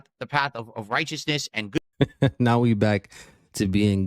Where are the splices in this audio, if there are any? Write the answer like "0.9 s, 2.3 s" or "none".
1.9 s